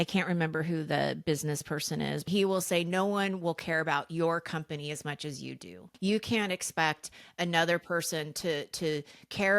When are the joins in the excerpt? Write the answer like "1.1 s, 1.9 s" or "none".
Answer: 2.2 s, 5.9 s